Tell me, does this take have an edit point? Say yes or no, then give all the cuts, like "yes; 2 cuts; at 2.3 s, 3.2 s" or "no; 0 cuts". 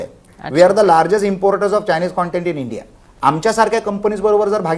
yes; 1 cut; at 3.0 s